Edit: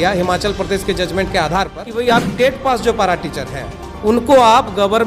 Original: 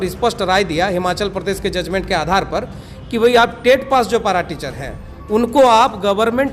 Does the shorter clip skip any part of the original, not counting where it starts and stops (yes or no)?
yes